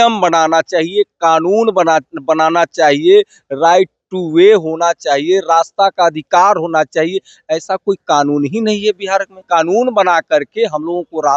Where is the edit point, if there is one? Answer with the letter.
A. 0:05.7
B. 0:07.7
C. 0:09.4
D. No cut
C